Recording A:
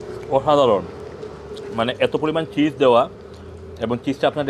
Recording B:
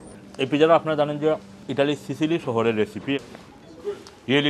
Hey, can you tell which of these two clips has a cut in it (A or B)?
B